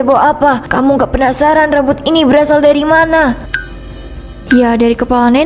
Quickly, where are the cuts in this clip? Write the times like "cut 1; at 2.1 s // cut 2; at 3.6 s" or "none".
none